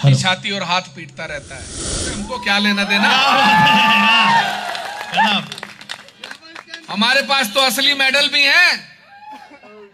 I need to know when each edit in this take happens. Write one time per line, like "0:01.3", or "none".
0:02.0